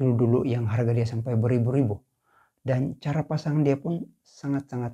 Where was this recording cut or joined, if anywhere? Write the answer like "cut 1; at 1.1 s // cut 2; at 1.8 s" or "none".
none